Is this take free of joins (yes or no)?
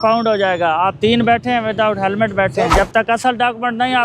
no